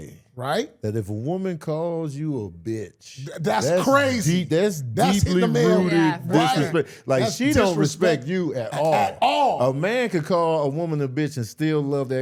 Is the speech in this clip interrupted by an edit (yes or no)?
no